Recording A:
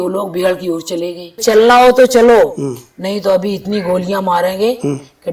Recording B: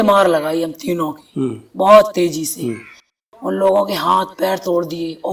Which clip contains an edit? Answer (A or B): A